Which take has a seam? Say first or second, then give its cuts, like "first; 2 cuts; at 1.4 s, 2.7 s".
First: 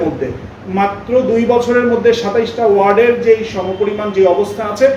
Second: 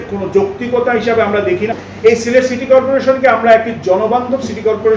second; 1 cut; at 1.7 s